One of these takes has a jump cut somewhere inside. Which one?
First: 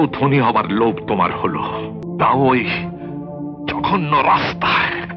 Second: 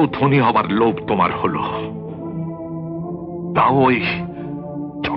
first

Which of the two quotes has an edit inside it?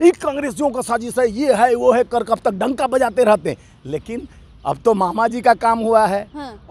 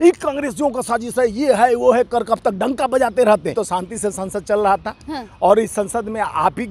second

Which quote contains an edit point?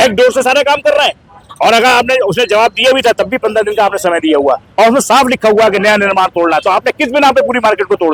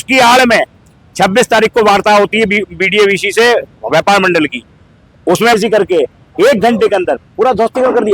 second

